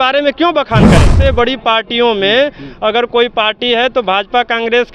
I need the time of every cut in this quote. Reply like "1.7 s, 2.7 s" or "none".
1.1 s